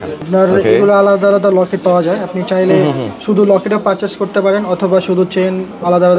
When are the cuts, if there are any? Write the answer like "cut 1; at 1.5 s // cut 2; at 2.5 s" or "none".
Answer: none